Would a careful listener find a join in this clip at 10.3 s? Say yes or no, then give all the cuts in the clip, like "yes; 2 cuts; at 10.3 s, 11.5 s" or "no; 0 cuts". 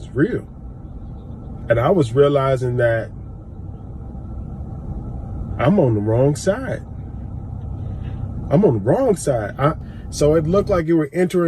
yes; 1 cut; at 10.3 s